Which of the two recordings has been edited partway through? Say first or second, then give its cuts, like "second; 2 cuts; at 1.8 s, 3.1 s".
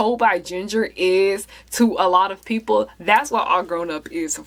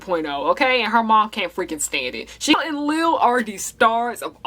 second; 1 cut; at 2.5 s